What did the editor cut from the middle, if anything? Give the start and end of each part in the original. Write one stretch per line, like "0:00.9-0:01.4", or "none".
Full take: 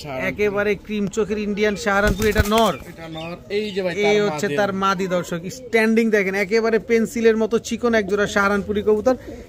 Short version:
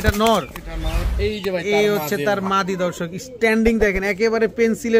none